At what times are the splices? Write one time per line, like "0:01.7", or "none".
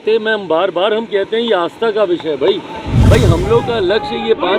0:02.9